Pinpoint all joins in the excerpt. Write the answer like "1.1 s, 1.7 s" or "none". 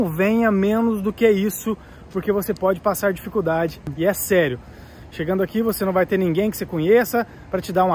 3.9 s